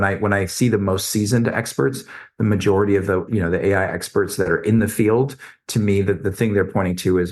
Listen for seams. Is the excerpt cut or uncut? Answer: cut